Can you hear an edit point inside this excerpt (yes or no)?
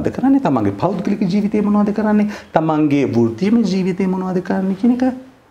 no